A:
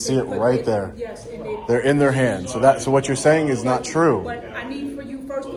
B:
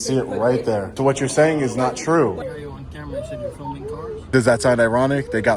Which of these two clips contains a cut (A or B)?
B